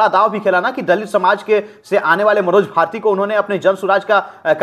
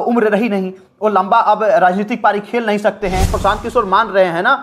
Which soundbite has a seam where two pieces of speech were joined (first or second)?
second